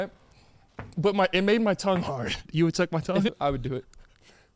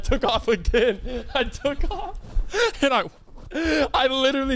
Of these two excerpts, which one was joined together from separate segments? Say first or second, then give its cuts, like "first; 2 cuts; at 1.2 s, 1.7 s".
first; 2 cuts; at 2.5 s, 3.3 s